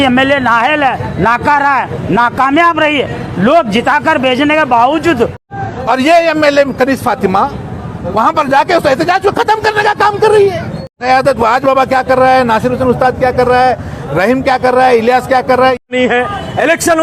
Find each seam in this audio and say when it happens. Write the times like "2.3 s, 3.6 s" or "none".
5.4 s, 11.0 s, 15.8 s